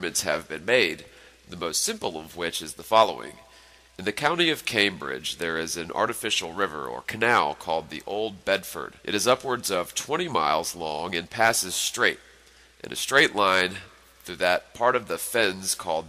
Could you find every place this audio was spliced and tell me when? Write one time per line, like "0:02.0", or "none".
none